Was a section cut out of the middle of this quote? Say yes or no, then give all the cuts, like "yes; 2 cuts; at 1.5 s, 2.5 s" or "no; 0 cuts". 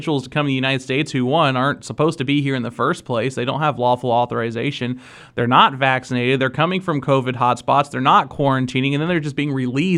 no; 0 cuts